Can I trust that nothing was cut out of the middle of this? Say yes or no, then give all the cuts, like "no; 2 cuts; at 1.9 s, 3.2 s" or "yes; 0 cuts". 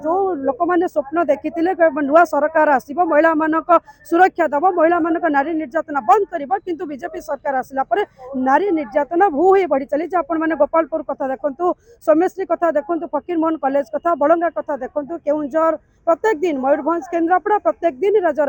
yes; 0 cuts